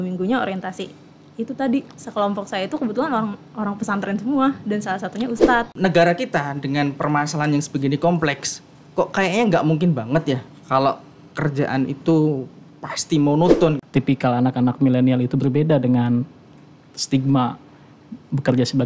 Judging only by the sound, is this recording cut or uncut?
cut